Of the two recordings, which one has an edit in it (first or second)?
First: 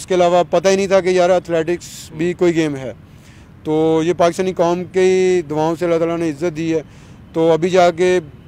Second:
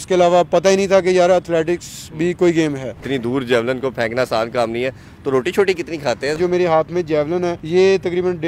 second